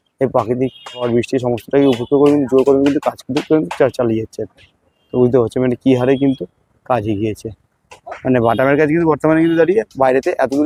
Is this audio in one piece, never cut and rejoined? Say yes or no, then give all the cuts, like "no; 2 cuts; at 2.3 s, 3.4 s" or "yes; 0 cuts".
yes; 0 cuts